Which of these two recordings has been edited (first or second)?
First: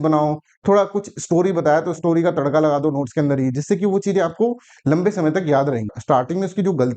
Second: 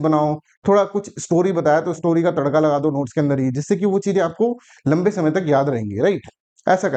first